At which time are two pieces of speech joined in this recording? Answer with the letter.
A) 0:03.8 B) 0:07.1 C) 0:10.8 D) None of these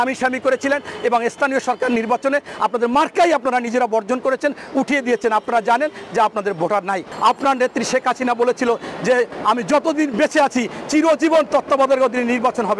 B